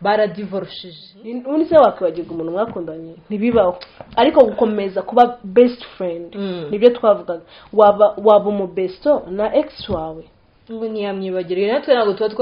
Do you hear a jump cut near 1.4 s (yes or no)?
yes